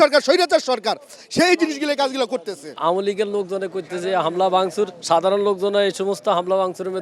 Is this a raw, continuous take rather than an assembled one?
yes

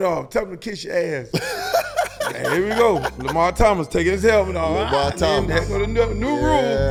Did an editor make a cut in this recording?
no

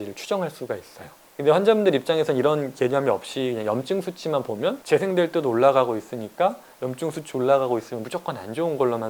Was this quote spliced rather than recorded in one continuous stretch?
yes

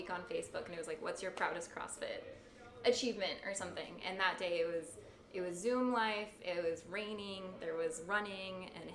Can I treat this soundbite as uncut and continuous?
yes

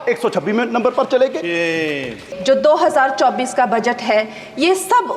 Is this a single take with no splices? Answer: no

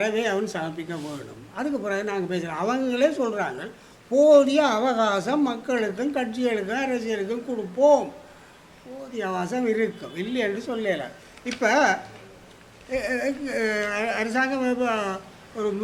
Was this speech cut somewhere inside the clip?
no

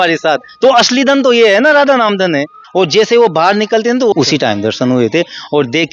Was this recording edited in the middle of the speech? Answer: yes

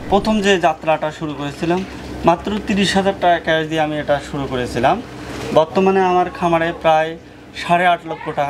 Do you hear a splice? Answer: no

